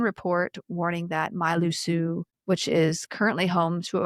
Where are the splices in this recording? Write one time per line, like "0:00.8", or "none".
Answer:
0:02.3